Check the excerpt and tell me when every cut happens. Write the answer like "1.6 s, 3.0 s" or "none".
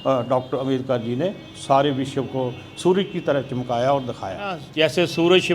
4.6 s